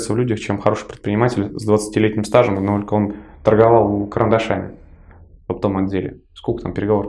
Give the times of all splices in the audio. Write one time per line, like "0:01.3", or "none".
none